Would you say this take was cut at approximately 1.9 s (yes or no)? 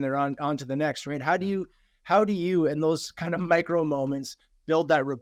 no